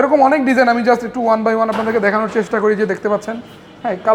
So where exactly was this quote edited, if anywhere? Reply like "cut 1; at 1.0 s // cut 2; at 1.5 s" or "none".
none